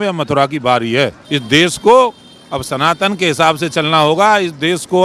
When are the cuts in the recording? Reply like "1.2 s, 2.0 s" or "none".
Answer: 1.3 s